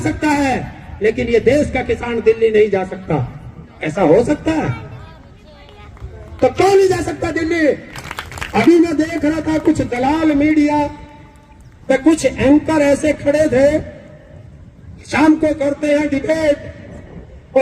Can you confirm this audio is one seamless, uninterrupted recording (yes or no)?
no